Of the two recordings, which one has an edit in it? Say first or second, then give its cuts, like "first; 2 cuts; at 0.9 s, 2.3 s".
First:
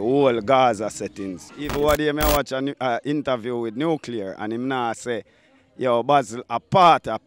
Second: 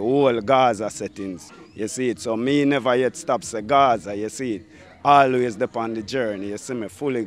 first; 1 cut; at 1.6 s